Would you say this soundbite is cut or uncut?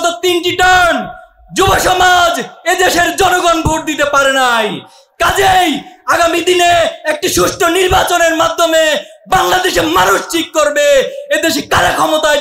uncut